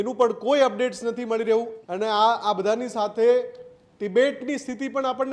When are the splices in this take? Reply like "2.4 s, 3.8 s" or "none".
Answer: 1.8 s

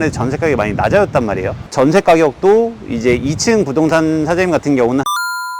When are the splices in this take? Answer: 1.6 s

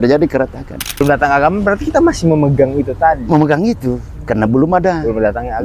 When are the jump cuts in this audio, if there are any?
1.0 s

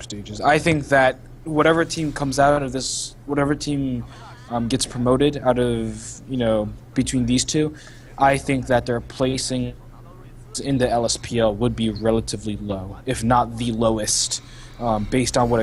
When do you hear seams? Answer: none

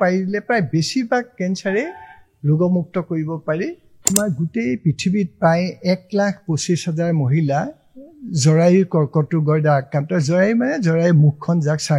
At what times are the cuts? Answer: 3.9 s

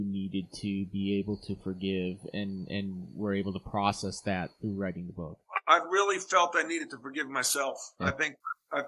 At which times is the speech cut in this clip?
none

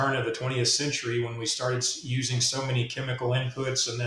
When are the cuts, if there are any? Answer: none

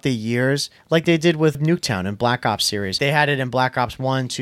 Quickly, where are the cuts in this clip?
1.6 s, 3.0 s

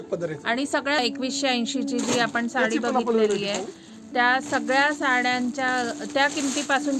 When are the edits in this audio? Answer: 1.0 s

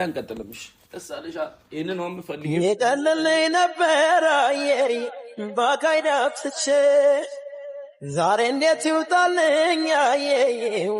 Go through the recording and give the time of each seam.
none

